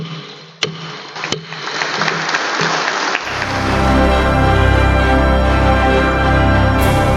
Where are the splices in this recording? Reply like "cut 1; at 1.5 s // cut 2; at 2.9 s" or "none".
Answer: cut 1; at 3.6 s